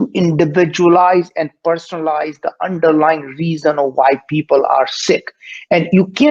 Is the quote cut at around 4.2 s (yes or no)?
no